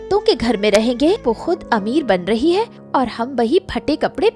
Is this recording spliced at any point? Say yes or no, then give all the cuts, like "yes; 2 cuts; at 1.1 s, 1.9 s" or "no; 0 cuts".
yes; 1 cut; at 1.2 s